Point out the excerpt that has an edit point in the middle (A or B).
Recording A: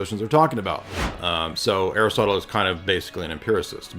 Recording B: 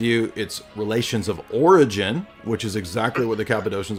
A